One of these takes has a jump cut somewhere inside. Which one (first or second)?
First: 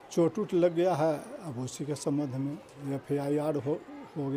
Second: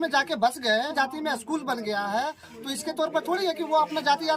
second